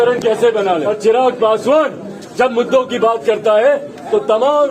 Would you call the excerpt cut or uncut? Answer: cut